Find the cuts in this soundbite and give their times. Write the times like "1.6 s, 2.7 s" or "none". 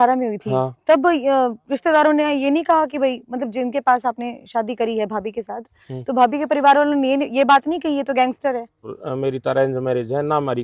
9.0 s

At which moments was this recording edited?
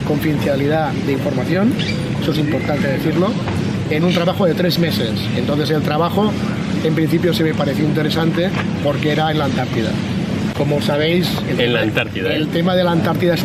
none

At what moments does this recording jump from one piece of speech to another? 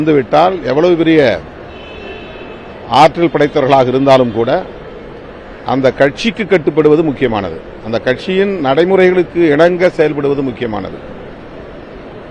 none

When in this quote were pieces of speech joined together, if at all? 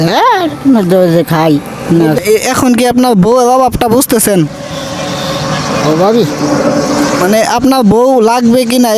2.2 s

